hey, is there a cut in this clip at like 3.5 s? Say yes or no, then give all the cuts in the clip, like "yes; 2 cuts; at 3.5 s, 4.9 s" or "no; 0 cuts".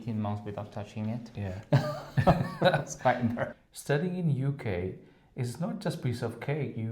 yes; 1 cut; at 3.5 s